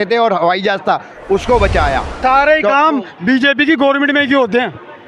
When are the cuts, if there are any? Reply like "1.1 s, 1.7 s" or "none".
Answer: 2.2 s